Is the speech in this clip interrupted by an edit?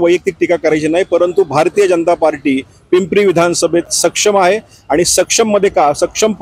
no; 0 cuts

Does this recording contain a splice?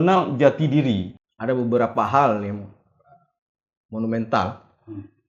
yes; 1 cut; at 1.2 s

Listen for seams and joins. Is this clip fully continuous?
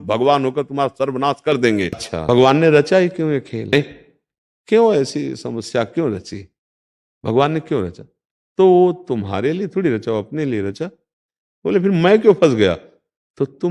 no; 1 cut; at 2.0 s

